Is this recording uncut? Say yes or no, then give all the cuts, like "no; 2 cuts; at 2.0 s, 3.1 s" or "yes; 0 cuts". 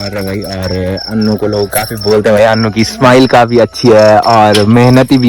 yes; 0 cuts